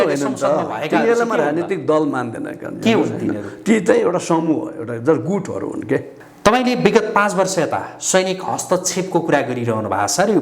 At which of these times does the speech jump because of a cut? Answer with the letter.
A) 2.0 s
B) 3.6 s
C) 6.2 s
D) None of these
C